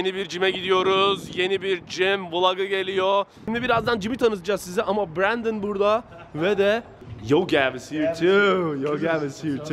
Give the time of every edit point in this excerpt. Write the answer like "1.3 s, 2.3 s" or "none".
3.4 s, 7.0 s